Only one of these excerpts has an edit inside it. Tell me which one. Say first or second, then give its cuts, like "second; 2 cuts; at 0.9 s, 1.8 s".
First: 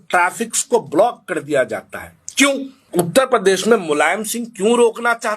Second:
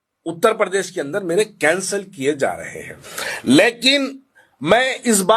first; 1 cut; at 2.8 s